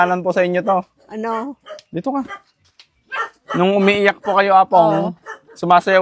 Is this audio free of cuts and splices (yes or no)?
yes